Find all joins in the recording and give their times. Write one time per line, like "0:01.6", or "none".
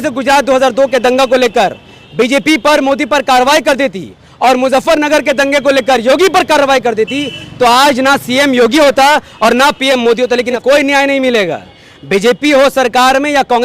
0:10.6